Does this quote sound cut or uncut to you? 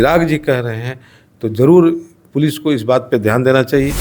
uncut